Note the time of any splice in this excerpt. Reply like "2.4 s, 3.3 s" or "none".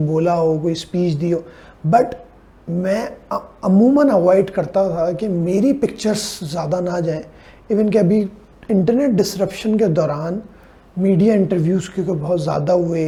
none